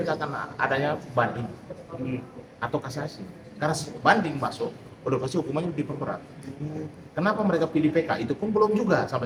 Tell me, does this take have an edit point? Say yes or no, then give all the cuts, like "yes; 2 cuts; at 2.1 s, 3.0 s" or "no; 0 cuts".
no; 0 cuts